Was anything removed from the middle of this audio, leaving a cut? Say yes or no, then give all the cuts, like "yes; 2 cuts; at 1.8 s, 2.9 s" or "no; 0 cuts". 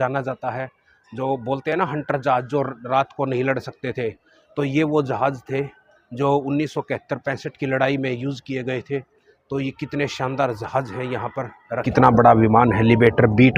yes; 1 cut; at 12.0 s